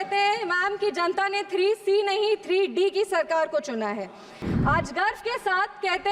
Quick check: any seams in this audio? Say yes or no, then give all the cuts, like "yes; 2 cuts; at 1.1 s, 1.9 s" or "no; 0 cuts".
yes; 1 cut; at 4.4 s